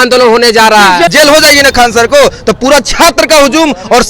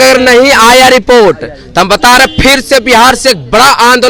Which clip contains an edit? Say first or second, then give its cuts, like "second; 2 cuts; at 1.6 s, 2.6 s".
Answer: first; 1 cut; at 1.1 s